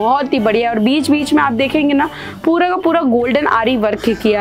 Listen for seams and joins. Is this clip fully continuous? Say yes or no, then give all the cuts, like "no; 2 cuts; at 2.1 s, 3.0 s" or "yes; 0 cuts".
yes; 0 cuts